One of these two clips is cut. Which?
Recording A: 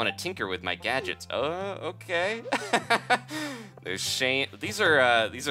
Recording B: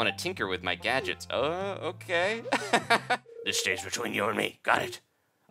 B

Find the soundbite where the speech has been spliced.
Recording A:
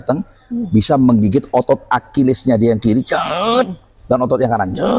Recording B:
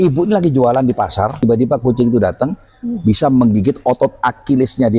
B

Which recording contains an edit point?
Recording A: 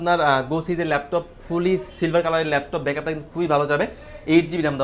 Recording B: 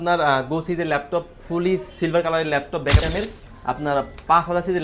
B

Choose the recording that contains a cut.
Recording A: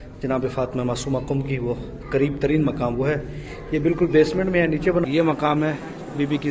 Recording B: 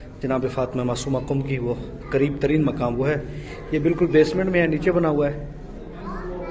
A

